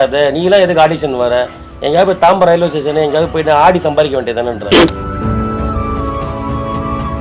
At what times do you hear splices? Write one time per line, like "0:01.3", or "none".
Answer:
none